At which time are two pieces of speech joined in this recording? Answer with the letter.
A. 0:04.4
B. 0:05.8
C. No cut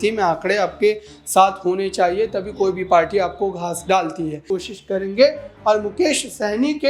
A